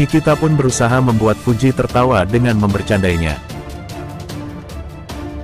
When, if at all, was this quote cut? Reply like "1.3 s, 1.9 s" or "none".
3.4 s